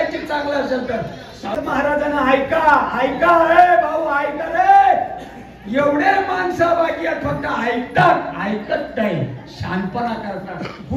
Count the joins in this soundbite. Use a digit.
1